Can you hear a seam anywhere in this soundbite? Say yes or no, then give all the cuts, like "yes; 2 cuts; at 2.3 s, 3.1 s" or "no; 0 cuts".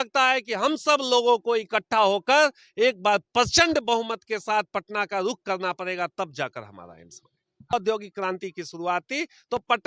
yes; 1 cut; at 7.7 s